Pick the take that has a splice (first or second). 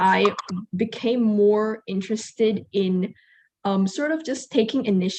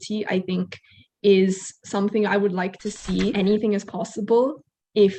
second